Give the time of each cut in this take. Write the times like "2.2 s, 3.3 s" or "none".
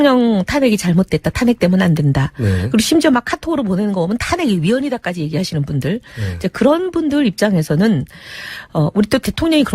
none